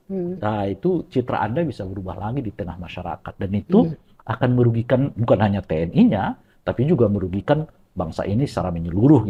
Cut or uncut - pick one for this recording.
uncut